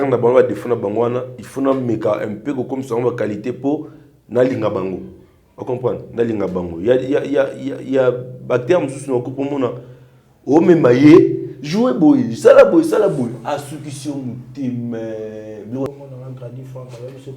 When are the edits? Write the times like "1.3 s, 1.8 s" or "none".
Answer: 15.9 s